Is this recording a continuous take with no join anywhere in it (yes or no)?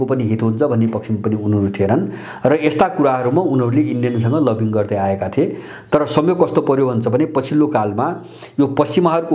yes